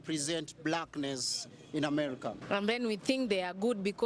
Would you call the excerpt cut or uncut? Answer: cut